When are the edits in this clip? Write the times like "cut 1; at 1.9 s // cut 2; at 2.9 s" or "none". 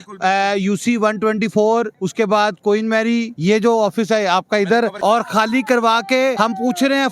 cut 1; at 2.0 s // cut 2; at 3.3 s // cut 3; at 5.0 s // cut 4; at 6.4 s